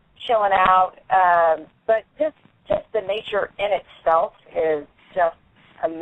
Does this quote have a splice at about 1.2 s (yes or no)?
yes